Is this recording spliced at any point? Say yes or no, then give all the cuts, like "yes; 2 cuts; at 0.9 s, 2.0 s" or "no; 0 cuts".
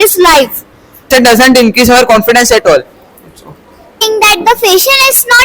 yes; 2 cuts; at 1.1 s, 4.0 s